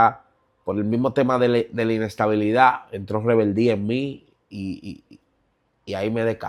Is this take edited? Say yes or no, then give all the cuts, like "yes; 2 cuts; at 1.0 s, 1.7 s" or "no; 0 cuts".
no; 0 cuts